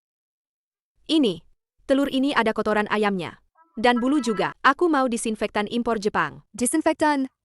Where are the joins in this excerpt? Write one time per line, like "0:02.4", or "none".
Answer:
0:04.5
0:06.4